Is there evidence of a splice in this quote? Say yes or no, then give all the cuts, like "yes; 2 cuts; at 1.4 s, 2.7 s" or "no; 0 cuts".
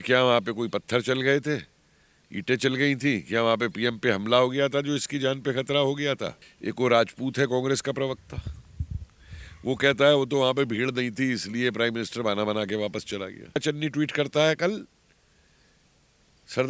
yes; 2 cuts; at 6.5 s, 13.6 s